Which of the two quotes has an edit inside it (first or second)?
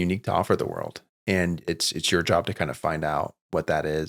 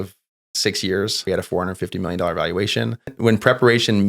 second